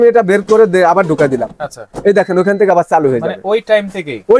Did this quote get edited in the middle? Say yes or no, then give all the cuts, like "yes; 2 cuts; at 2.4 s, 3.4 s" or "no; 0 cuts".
no; 0 cuts